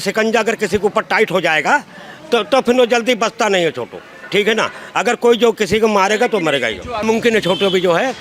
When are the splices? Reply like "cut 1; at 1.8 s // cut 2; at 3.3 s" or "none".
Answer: cut 1; at 7.0 s